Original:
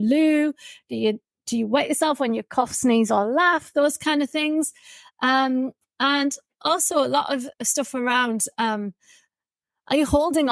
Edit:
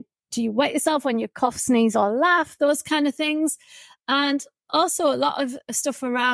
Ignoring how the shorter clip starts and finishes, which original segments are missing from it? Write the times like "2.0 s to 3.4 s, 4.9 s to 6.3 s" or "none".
5.1 s to 5.8 s